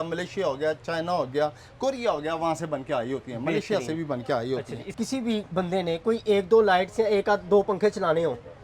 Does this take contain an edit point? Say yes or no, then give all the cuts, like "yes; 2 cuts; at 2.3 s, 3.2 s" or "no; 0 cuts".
yes; 1 cut; at 4.8 s